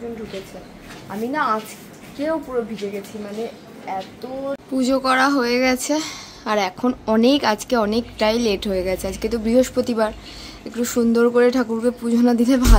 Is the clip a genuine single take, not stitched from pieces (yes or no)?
no